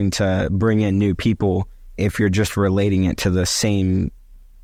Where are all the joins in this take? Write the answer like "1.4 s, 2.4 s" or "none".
none